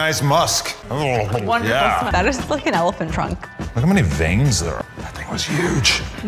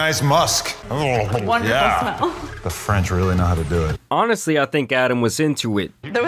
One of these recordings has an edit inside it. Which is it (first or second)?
first